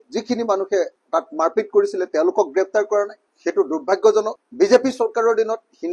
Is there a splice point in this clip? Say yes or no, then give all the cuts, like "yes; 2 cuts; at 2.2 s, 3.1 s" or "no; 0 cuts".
no; 0 cuts